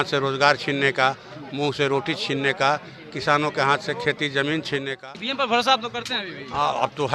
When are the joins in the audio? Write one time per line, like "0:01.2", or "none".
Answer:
0:04.9